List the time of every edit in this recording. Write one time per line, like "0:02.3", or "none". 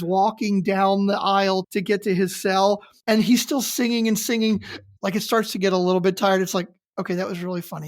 0:01.7
0:02.9
0:04.8